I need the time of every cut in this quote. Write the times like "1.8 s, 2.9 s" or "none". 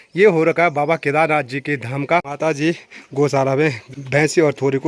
2.3 s, 3.9 s